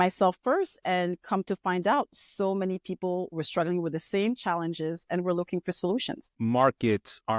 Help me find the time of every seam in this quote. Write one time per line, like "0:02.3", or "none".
0:06.2